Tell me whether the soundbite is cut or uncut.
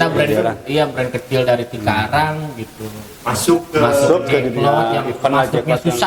uncut